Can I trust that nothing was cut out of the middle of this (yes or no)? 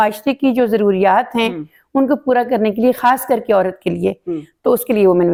yes